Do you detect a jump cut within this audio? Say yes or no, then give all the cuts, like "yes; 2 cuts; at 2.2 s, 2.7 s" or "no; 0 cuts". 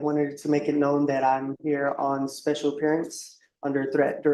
no; 0 cuts